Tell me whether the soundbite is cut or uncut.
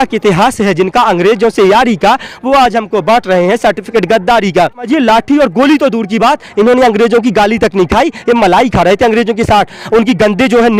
cut